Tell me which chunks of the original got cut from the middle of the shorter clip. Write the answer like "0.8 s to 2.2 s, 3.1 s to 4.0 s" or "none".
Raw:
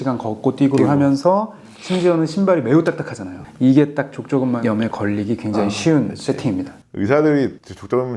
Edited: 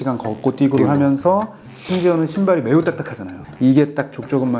none

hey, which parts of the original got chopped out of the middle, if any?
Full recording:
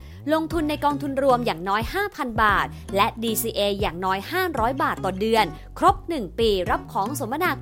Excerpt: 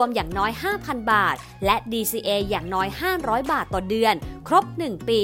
none

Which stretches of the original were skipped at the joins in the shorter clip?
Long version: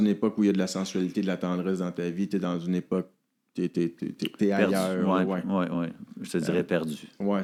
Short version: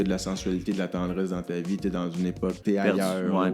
3.1 s to 4.3 s

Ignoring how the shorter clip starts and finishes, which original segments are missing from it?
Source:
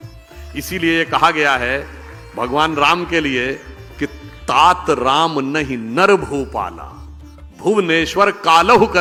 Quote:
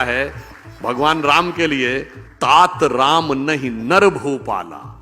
3.8 s to 4.3 s

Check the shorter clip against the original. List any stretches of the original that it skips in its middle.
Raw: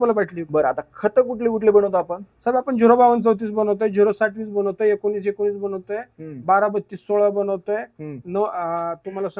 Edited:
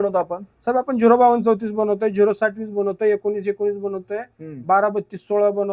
none

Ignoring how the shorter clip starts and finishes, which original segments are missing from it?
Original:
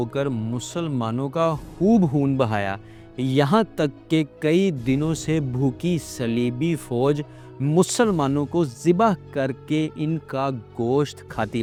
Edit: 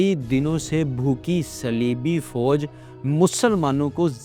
none

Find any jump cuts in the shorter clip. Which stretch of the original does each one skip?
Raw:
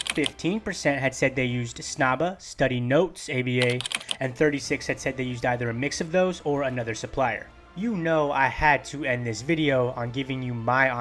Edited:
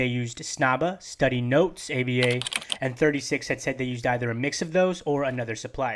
none

